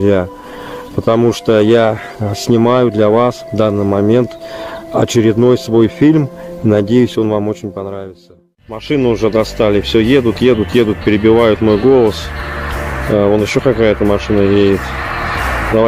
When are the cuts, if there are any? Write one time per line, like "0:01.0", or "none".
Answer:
0:08.8